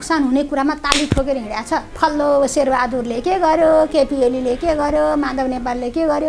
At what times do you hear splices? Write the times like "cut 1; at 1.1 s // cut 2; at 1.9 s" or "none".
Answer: cut 1; at 1.9 s